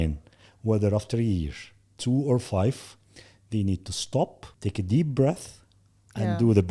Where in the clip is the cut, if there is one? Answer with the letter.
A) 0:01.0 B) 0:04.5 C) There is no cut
B